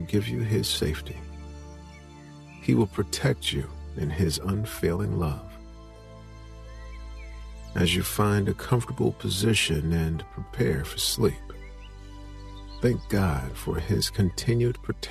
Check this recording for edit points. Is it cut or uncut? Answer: uncut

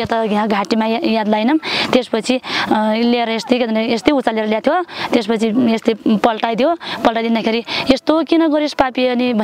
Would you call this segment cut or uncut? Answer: uncut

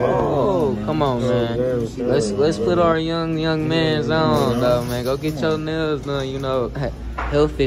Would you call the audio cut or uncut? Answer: uncut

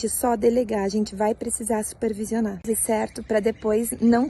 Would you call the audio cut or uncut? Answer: cut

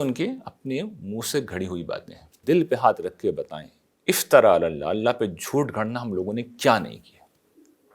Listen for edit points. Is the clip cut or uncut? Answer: cut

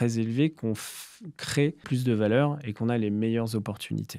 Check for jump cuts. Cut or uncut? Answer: cut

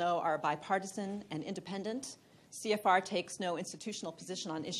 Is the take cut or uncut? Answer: cut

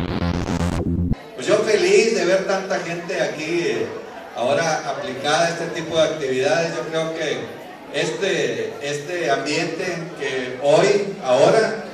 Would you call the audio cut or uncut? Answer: uncut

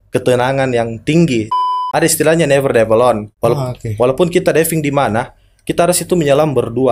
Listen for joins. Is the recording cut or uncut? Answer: cut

